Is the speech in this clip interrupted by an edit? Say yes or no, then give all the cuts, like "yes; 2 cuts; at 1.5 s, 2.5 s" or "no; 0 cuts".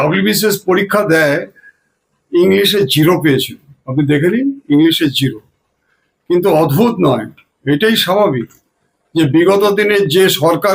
no; 0 cuts